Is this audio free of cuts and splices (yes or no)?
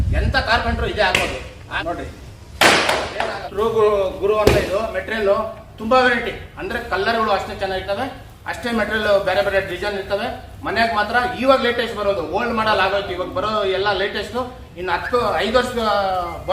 no